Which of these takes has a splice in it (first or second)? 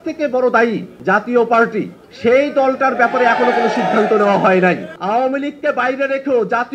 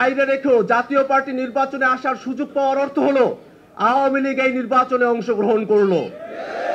first